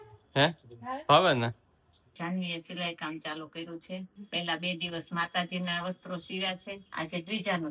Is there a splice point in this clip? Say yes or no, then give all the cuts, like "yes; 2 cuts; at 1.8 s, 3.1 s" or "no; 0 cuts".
yes; 3 cuts; at 2.0 s, 4.2 s, 6.8 s